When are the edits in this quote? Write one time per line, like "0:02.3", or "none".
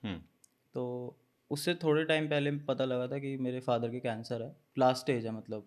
0:04.6